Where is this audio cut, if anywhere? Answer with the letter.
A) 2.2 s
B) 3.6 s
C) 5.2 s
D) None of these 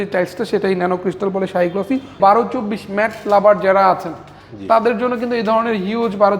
A